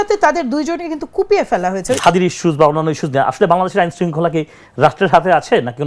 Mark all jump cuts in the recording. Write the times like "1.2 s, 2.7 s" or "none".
2.0 s